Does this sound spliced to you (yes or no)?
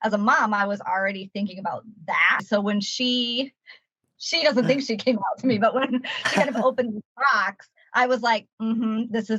yes